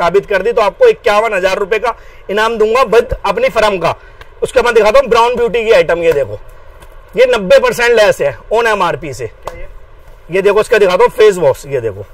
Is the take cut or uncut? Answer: uncut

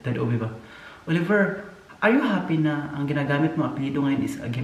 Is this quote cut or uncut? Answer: uncut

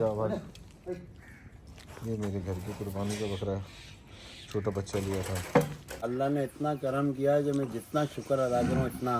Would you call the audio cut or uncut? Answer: cut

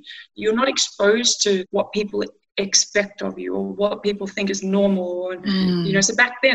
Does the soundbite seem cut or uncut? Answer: cut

